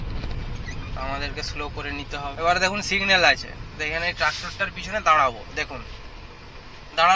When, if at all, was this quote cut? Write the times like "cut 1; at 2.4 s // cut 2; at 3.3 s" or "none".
cut 1; at 2.3 s